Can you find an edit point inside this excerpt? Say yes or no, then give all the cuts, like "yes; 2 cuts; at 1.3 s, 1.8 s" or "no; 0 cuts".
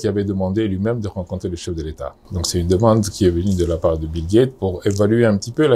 no; 0 cuts